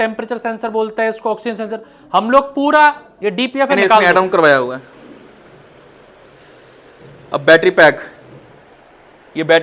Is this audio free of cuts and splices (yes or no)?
no